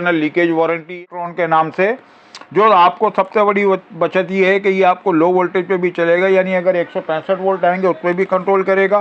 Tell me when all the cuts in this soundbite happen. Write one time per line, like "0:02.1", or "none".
0:00.9